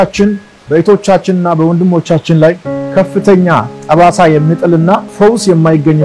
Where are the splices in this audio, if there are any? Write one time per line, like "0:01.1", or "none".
0:05.1